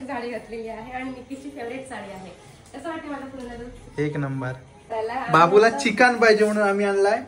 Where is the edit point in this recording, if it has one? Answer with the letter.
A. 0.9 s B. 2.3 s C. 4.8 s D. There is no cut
C